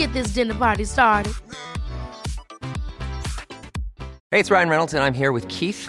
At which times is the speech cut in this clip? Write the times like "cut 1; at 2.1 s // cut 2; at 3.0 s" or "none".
cut 1; at 4.1 s